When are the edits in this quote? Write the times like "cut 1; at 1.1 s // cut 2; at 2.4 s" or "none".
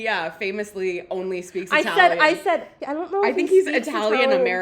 cut 1; at 2.8 s